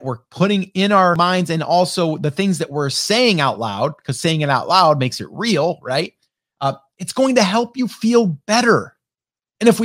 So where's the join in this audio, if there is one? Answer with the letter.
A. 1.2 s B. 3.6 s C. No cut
A